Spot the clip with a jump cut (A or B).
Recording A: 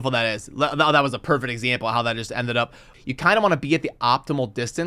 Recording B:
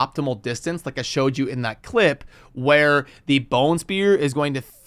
A